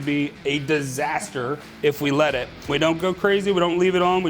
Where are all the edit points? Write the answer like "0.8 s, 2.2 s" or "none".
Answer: 2.5 s